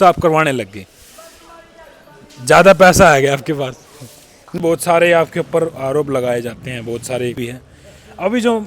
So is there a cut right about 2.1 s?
no; 2 cuts; at 4.6 s, 7.5 s

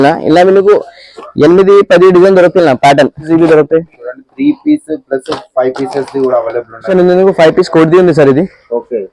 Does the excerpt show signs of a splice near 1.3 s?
no; 2 cuts; at 3.3 s, 6.9 s

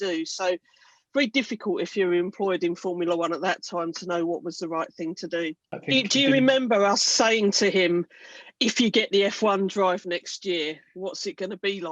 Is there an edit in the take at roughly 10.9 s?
no; 1 cut; at 5.7 s

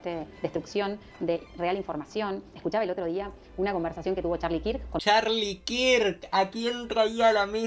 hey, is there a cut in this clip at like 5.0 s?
yes; 2 cuts; at 2.5 s, 5.0 s

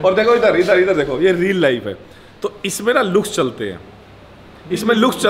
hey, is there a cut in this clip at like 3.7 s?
no; 0 cuts

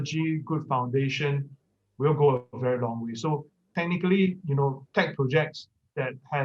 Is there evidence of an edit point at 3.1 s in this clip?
no; 0 cuts

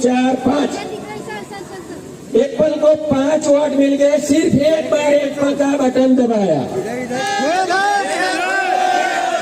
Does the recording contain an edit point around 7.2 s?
yes; 1 cut; at 7.2 s

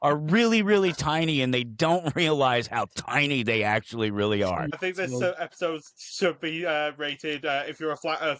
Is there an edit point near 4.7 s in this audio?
yes; 1 cut; at 4.7 s

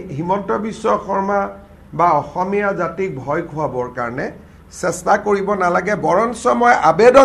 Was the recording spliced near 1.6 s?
no; 0 cuts

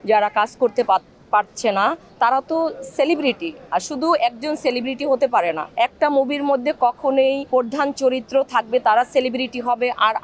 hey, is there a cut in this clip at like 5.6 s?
yes; 3 cuts; at 2.1 s, 5.6 s, 7.4 s

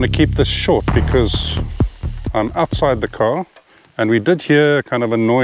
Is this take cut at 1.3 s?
no; 0 cuts

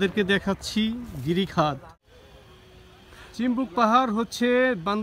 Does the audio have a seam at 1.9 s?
yes; 1 cut; at 1.9 s

